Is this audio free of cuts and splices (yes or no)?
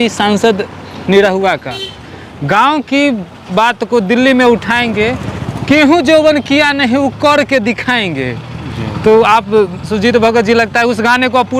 yes